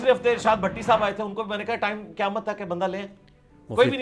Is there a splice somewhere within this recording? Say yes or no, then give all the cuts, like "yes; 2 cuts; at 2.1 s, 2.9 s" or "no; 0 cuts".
no; 0 cuts